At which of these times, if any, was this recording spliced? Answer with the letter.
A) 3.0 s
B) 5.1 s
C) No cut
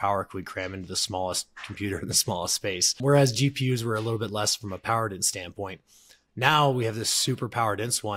A